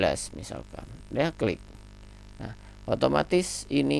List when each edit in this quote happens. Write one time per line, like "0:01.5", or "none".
none